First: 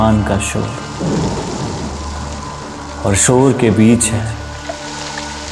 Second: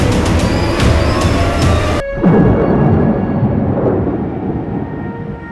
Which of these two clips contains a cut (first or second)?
second